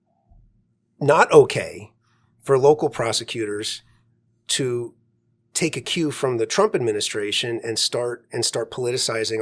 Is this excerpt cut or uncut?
uncut